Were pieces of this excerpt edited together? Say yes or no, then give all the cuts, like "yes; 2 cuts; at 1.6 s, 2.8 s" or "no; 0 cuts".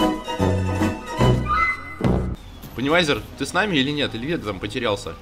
yes; 1 cut; at 2.4 s